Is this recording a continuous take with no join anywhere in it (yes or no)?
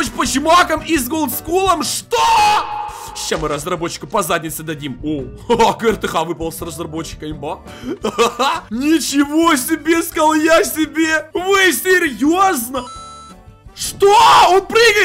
yes